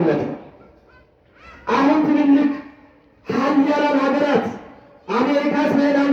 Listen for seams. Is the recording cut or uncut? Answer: uncut